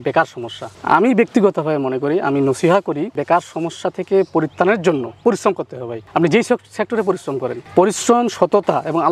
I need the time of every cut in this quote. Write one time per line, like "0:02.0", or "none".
none